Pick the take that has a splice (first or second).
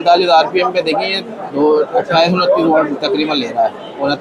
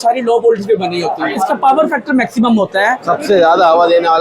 second